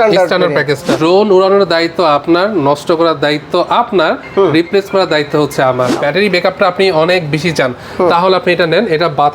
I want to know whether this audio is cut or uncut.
cut